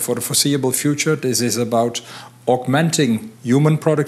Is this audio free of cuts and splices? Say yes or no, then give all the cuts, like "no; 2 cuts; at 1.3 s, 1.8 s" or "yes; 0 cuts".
yes; 0 cuts